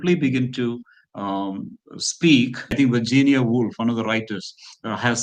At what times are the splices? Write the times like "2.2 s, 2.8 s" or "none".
2.7 s